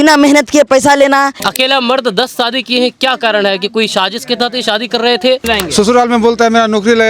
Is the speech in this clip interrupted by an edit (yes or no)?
yes